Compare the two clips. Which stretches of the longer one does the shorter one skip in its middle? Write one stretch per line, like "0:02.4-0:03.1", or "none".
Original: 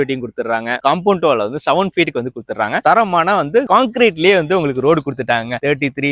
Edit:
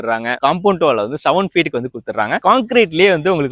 0:02.8-0:03.6